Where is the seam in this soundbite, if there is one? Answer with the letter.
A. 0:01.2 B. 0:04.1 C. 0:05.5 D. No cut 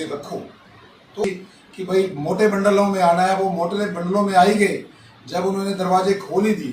A